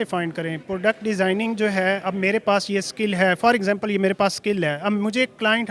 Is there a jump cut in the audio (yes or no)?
no